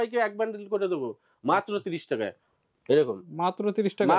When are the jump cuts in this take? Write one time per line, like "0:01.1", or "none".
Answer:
none

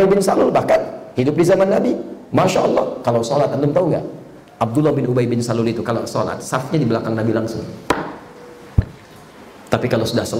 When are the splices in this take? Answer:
none

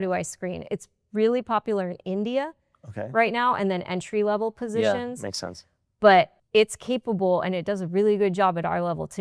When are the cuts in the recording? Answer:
0:06.4

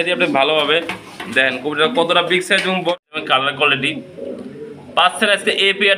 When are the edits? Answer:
0:02.9

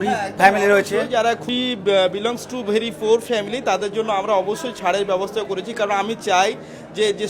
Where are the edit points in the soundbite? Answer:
0:01.4

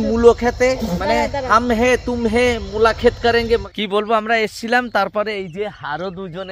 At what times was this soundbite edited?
0:03.6

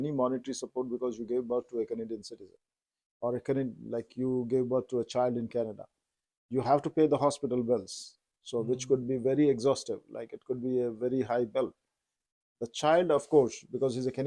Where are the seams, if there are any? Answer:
none

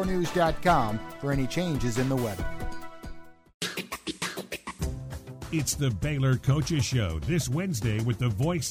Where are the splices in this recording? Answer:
0:03.2

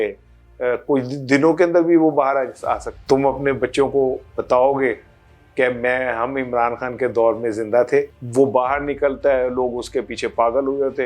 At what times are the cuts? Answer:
0:02.9
0:08.2

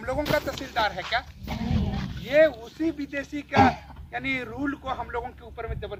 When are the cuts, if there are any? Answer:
none

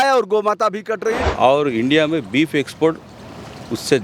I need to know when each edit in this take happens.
0:01.2

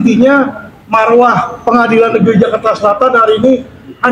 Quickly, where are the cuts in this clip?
none

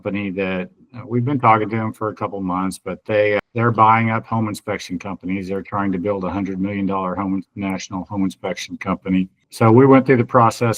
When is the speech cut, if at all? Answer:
0:09.5

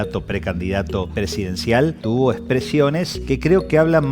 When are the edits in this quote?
0:01.1
0:02.0
0:03.1

